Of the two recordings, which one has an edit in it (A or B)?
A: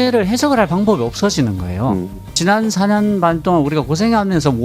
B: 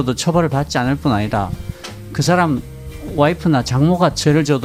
A